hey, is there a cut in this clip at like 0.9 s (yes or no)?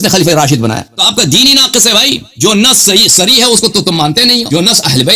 yes